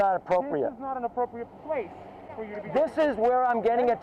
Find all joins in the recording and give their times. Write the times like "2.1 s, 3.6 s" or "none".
none